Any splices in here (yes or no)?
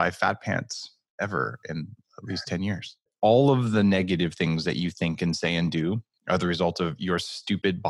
yes